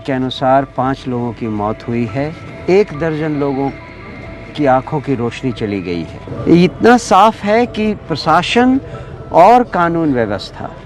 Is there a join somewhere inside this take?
yes; 2 cuts; at 2.5 s, 6.3 s

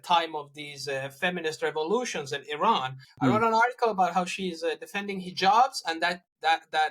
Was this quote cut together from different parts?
yes; 1 cut; at 3.0 s

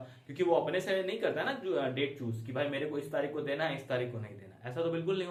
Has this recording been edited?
no; 0 cuts

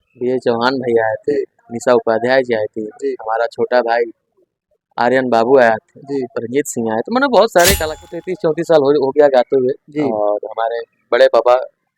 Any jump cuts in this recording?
yes; 1 cut; at 8.0 s

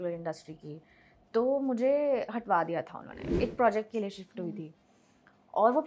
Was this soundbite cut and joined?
yes; 1 cut; at 3.3 s

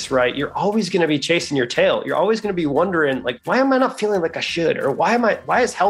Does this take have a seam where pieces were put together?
no; 0 cuts

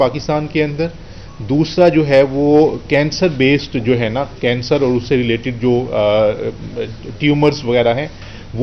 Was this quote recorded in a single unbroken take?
yes; 0 cuts

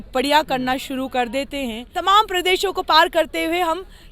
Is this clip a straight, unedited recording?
no; 1 cut; at 1.8 s

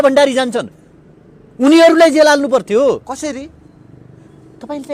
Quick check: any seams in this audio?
no; 0 cuts

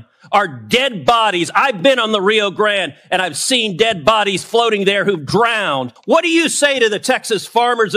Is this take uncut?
no; 1 cut; at 5.9 s

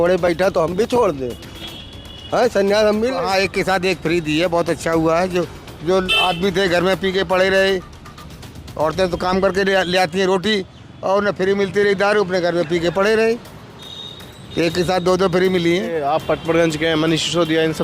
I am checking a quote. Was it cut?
yes; 2 cuts; at 3.2 s, 16.0 s

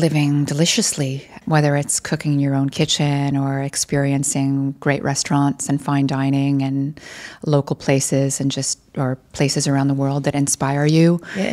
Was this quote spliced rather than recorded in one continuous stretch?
yes; 1 cut; at 1.4 s

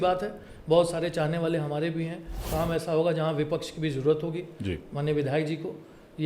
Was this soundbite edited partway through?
yes; 1 cut; at 2.4 s

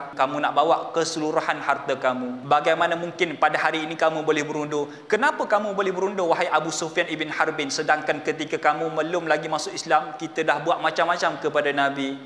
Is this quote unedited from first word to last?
no; 1 cut; at 2.3 s

